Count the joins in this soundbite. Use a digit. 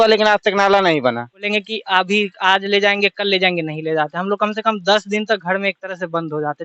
1